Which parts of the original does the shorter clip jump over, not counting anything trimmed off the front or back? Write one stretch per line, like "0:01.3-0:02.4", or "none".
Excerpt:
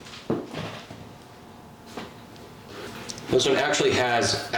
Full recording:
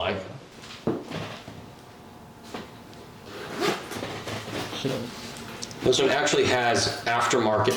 0:03.4-0:05.4